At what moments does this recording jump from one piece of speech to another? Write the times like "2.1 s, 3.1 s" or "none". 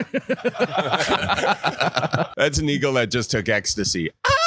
2.3 s